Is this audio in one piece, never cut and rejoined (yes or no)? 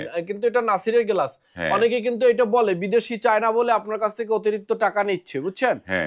yes